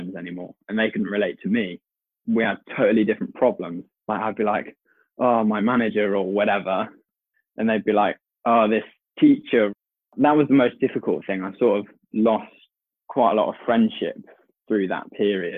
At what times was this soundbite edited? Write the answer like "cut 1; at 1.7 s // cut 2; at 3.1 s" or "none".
cut 1; at 9.7 s